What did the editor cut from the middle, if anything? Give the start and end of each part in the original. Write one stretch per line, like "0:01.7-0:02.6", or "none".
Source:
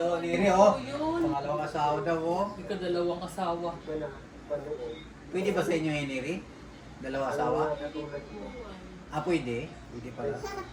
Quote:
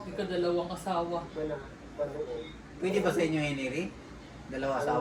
none